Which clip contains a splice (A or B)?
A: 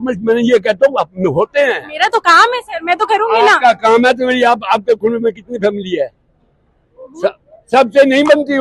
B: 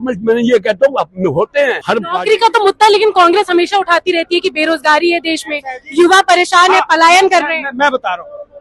B